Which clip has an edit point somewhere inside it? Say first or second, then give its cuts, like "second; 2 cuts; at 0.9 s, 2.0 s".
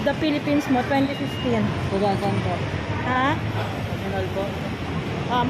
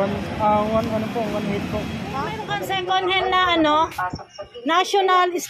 second; 1 cut; at 2.5 s